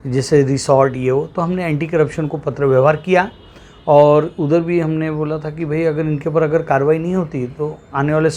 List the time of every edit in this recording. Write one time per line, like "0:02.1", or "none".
none